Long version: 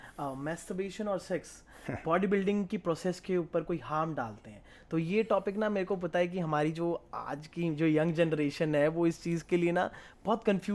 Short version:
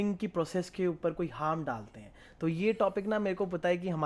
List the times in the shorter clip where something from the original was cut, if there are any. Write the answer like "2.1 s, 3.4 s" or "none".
none

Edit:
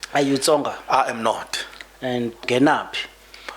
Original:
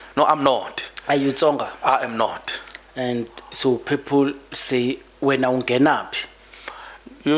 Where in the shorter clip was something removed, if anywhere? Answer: 2.5 s

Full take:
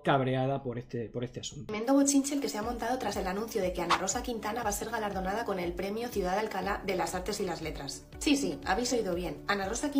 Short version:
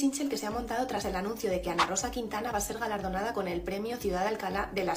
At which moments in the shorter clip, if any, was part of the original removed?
none

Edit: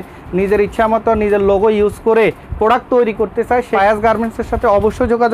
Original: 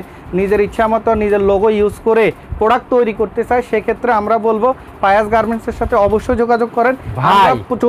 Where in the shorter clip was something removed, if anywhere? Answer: 3.7 s

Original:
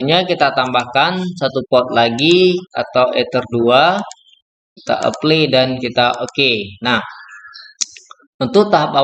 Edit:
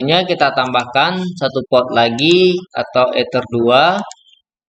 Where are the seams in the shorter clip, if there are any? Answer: none

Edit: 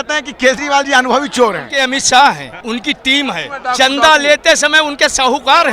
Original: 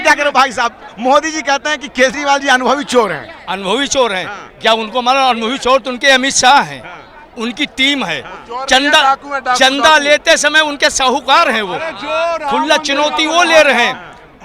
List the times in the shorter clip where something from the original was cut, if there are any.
1.7 s, 2.5 s, 3.5 s

